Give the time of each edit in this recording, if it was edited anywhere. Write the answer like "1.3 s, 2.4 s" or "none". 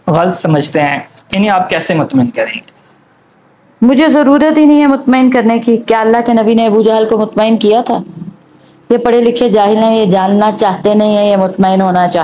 none